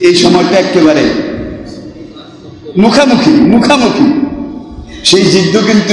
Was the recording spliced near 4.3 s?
no; 0 cuts

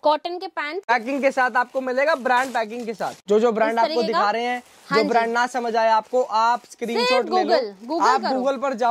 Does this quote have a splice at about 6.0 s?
no; 2 cuts; at 0.8 s, 3.1 s

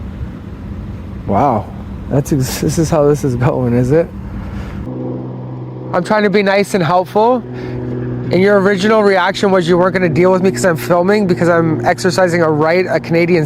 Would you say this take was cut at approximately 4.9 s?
yes; 1 cut; at 4.9 s

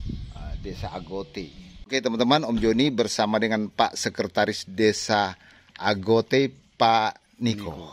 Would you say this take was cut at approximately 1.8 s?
yes; 1 cut; at 1.8 s

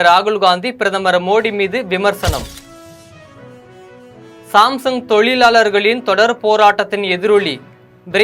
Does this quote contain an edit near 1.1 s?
no; 2 cuts; at 2.5 s, 4.4 s

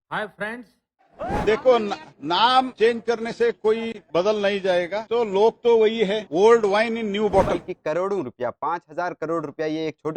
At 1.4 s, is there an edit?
yes; 2 cuts; at 1.4 s, 7.6 s

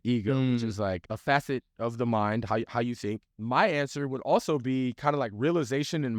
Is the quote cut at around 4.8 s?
no; 2 cuts; at 1.1 s, 3.3 s

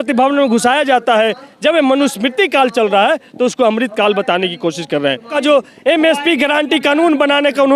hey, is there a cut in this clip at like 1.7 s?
no; 1 cut; at 5.3 s

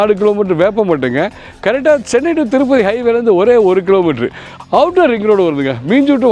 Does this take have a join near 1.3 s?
no; 1 cut; at 4.5 s

